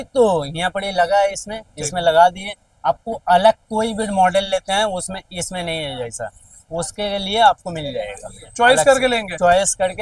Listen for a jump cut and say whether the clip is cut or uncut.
uncut